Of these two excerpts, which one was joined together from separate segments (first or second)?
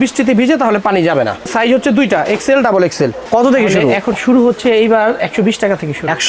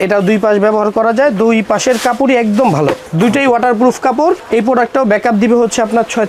first